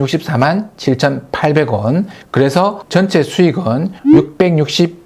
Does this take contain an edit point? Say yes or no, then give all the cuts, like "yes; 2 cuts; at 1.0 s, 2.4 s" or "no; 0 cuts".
no; 0 cuts